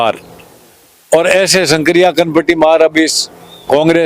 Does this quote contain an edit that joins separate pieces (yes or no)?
no